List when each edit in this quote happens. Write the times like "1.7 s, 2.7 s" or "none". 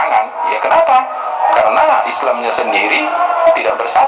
none

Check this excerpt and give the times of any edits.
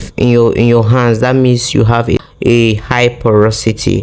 2.2 s

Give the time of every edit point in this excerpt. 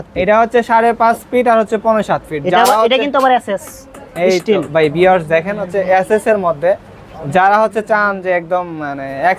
none

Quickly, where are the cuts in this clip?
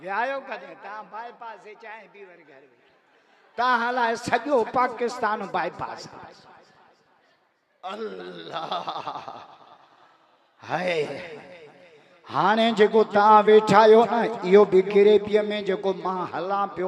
none

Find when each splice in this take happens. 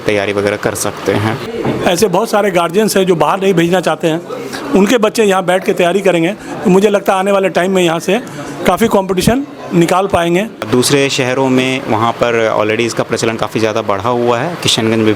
1.4 s, 10.6 s

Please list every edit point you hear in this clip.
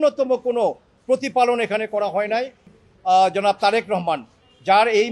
2.7 s

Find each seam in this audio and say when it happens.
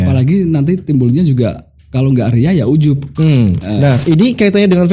3.6 s

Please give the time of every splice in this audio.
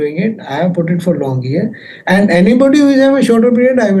none

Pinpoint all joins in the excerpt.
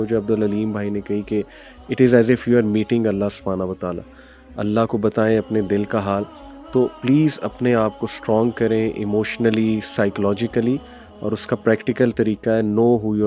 none

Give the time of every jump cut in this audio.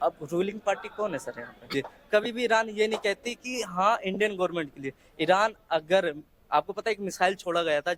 1.7 s

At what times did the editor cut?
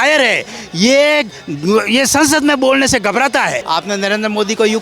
3.6 s

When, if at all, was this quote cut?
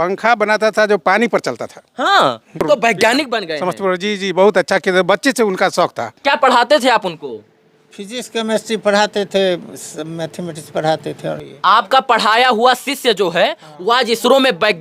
2.6 s, 6.2 s, 11.5 s

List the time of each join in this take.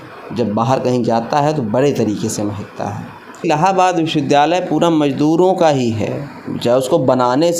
3.4 s

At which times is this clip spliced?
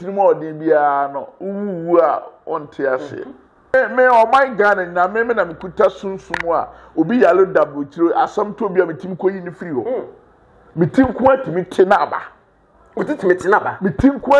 3.7 s

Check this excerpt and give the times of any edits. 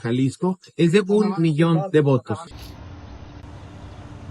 2.4 s

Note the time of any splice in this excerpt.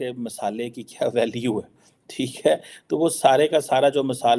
none

